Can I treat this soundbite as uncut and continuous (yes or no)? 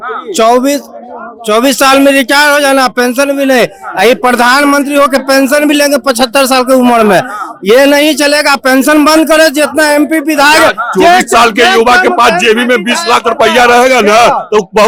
yes